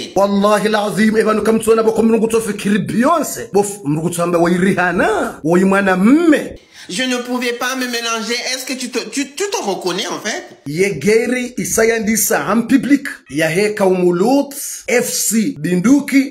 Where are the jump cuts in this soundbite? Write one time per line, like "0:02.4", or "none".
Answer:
0:10.7